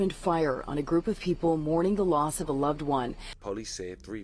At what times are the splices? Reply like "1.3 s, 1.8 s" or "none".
3.3 s